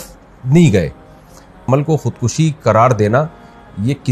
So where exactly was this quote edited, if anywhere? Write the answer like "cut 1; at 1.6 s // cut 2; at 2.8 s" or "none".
cut 1; at 1.6 s

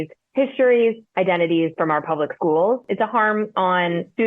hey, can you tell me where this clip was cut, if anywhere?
cut 1; at 2.9 s

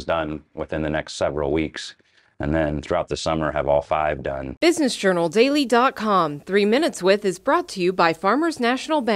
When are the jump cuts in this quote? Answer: cut 1; at 4.5 s

